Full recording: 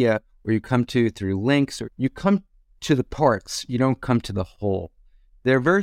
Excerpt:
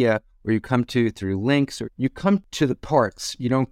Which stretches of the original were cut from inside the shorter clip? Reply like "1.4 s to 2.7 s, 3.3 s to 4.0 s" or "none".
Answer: 2.5 s to 2.8 s